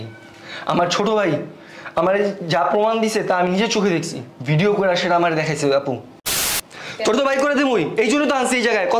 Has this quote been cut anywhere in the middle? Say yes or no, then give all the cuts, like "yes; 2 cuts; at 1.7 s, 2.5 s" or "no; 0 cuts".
yes; 1 cut; at 6.4 s